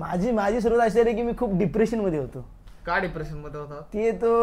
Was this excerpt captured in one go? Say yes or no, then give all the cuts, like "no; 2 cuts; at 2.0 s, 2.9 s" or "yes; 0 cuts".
yes; 0 cuts